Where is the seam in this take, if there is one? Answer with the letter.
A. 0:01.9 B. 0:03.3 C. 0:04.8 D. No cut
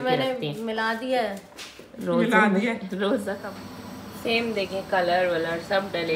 B